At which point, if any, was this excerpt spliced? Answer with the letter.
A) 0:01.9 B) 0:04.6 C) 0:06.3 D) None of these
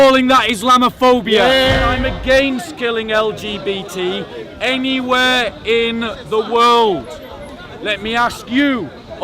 A